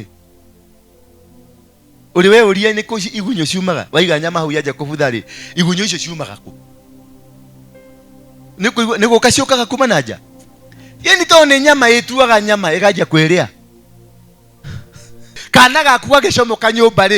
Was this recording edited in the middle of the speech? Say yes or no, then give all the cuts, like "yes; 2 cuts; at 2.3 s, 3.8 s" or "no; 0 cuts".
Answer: yes; 1 cut; at 15.4 s